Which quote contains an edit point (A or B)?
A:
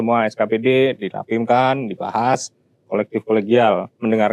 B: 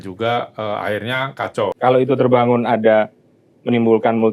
B